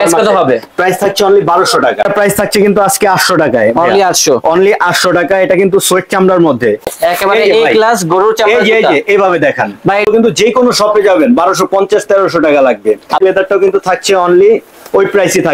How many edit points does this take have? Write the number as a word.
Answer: four